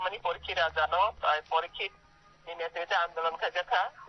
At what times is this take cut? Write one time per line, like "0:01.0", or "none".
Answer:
none